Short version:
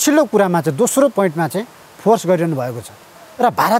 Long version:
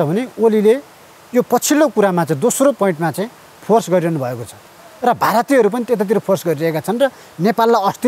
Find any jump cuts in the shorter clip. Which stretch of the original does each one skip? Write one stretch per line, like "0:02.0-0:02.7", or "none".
none